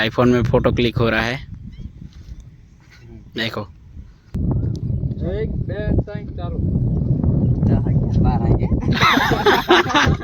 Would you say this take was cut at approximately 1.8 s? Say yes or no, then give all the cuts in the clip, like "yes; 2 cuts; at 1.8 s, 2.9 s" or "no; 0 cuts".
no; 1 cut; at 4.3 s